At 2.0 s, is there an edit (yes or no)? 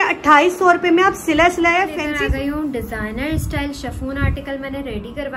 yes